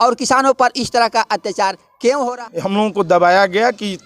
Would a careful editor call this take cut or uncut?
cut